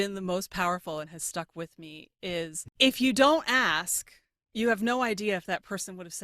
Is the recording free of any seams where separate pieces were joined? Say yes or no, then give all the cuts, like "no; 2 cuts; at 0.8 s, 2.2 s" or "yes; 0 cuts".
no; 1 cut; at 2.6 s